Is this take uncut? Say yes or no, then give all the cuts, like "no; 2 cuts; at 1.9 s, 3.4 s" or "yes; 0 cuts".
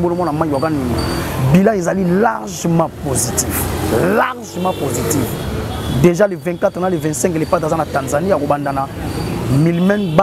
yes; 0 cuts